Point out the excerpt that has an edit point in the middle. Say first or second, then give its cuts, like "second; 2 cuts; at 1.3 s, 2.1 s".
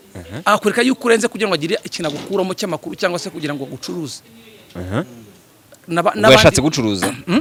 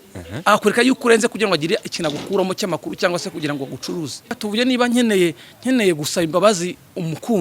second; 1 cut; at 4.4 s